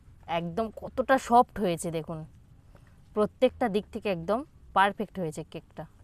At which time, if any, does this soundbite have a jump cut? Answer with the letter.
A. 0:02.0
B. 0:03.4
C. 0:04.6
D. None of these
D